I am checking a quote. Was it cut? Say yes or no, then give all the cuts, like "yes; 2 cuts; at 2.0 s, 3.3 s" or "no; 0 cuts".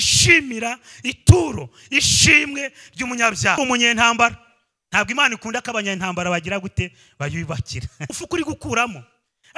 yes; 2 cuts; at 3.6 s, 8.2 s